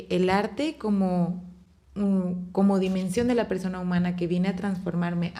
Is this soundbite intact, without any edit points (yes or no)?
yes